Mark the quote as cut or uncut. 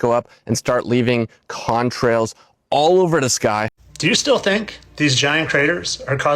cut